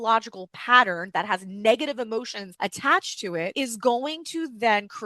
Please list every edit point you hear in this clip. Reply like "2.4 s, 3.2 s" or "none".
2.4 s, 3.5 s